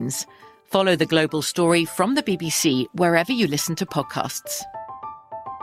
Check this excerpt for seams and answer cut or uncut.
uncut